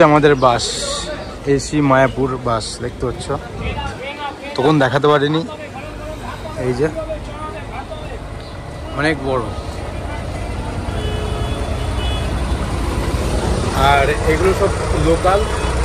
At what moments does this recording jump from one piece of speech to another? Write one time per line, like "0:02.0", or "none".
none

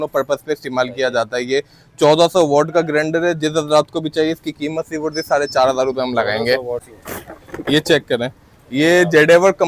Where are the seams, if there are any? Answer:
0:06.9

